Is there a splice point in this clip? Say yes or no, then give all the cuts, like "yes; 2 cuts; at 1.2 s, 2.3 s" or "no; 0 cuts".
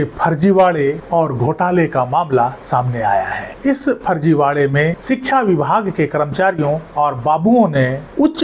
yes; 1 cut; at 5.0 s